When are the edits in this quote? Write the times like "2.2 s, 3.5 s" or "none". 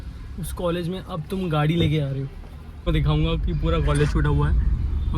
none